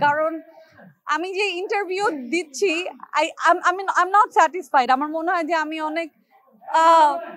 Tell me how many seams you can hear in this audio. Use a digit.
0